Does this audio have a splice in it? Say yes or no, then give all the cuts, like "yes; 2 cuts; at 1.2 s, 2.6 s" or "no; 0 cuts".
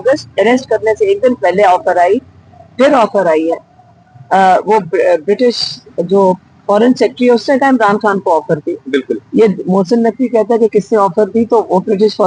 no; 0 cuts